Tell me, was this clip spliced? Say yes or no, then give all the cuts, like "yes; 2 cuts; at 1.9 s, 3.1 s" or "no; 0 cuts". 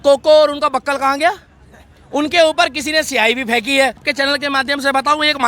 yes; 1 cut; at 4.0 s